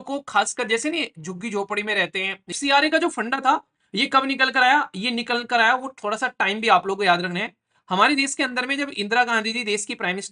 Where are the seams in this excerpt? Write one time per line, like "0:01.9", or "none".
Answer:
0:02.5